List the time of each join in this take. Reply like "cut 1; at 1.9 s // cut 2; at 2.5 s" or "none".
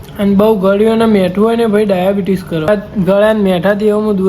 cut 1; at 2.7 s